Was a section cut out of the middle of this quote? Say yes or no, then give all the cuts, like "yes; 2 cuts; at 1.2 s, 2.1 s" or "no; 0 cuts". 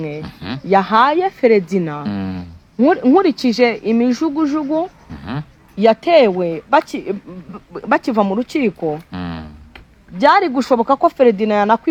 no; 0 cuts